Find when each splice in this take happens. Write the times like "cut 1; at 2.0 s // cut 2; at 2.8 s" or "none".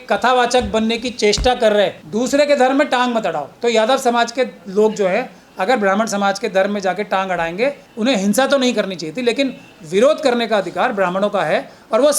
cut 1; at 2.0 s